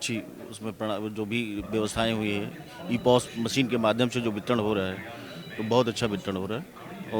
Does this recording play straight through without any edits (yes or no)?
yes